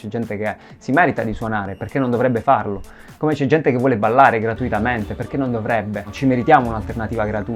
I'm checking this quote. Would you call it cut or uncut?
uncut